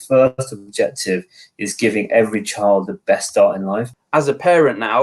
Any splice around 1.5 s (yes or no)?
no